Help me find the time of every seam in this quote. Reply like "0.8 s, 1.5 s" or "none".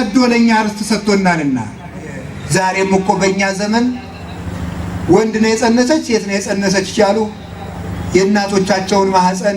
2.3 s